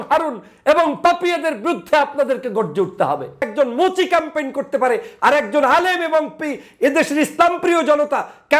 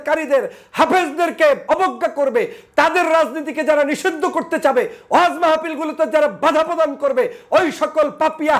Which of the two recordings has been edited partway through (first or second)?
first